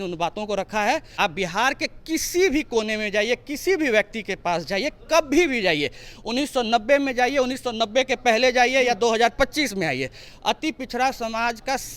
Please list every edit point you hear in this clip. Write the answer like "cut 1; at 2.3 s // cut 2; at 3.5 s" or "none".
cut 1; at 1.1 s